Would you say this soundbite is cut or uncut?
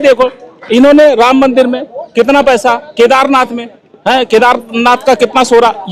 uncut